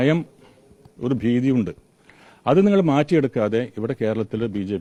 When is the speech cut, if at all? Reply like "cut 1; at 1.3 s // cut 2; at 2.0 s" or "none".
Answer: none